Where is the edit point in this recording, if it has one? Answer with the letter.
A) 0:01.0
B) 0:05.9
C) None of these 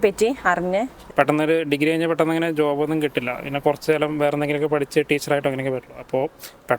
A